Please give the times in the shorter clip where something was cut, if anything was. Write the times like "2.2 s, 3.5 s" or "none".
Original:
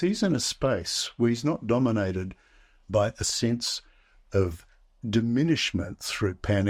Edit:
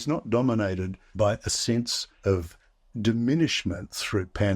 1.0 s, 2.0 s